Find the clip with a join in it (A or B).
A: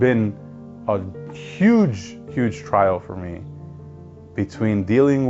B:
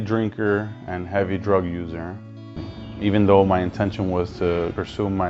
B